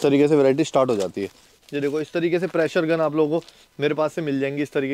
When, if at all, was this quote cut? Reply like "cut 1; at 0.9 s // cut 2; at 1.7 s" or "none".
cut 1; at 1.5 s